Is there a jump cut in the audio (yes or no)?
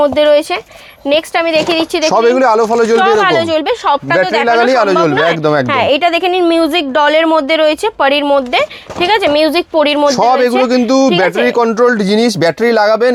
no